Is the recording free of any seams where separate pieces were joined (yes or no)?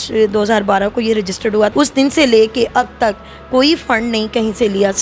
no